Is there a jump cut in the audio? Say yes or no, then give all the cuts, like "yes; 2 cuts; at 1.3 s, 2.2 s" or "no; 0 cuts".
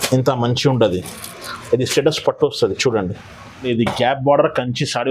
yes; 1 cut; at 3.5 s